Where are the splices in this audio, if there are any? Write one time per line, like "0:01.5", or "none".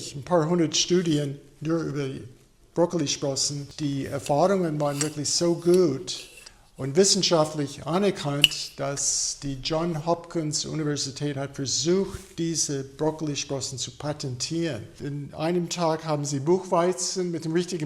0:03.6
0:14.9